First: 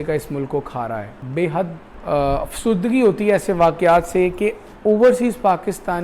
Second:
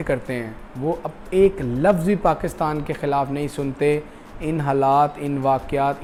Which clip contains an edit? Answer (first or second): first